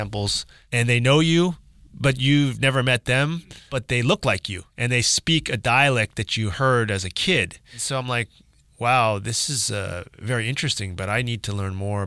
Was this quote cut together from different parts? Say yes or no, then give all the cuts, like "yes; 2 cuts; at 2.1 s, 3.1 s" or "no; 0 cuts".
yes; 2 cuts; at 3.8 s, 4.7 s